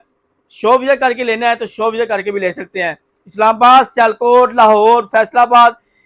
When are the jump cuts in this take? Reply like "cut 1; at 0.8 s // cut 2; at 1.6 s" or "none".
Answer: none